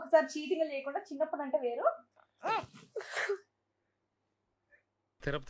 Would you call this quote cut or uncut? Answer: uncut